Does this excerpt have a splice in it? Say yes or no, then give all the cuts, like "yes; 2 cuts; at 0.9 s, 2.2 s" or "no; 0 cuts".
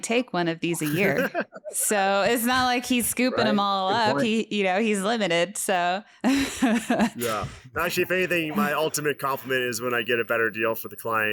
no; 0 cuts